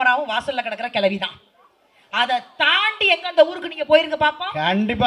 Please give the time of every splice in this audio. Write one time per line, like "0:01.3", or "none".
none